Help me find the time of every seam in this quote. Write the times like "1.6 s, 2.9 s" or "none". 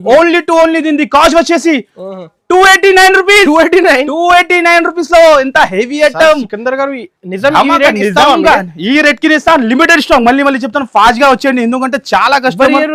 none